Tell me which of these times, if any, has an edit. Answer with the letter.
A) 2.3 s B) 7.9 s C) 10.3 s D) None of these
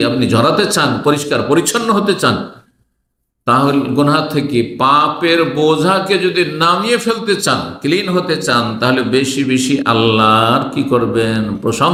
D